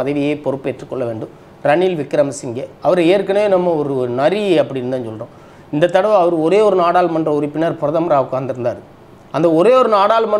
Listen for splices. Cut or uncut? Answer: uncut